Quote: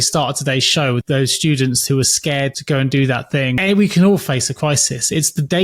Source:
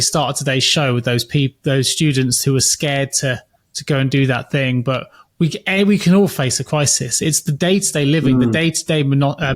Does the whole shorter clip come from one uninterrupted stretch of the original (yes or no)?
no